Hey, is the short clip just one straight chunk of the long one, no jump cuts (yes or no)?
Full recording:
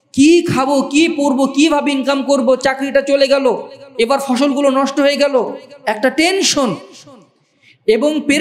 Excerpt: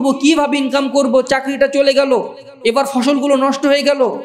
yes